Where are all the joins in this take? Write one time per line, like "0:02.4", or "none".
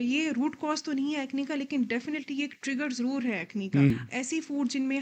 0:03.9